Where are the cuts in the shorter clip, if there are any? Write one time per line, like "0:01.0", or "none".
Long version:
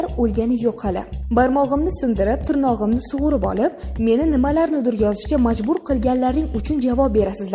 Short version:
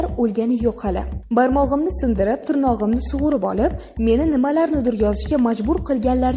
none